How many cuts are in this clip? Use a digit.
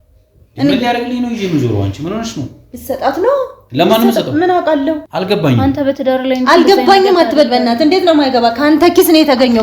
1